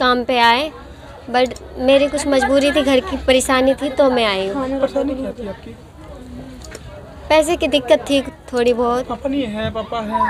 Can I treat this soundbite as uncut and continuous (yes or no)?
yes